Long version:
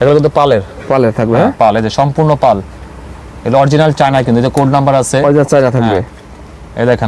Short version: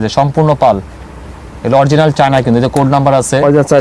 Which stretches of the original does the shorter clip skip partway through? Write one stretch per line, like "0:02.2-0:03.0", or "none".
none

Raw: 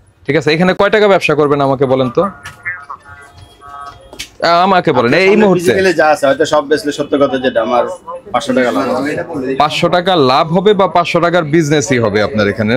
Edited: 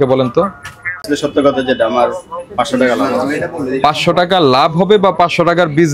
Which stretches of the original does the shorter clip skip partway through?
0:02.9-0:06.8

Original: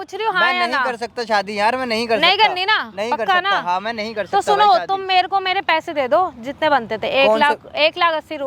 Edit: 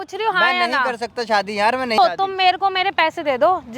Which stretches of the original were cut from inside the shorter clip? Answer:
0:02.0-0:04.7

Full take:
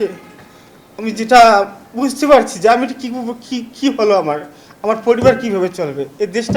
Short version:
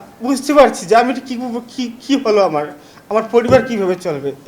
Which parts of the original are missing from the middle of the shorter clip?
none

